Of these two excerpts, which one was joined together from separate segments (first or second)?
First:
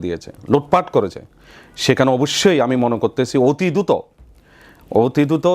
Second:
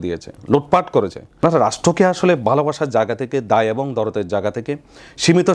second